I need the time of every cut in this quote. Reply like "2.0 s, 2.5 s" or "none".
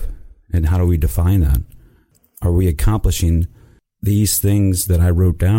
2.1 s